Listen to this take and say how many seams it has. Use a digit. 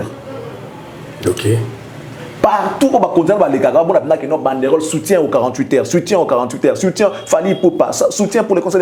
0